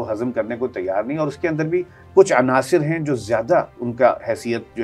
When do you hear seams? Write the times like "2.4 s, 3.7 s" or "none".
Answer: none